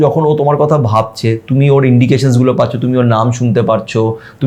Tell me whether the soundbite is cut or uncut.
uncut